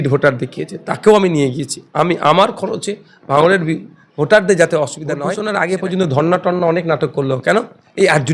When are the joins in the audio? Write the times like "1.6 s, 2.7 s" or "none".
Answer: 5.3 s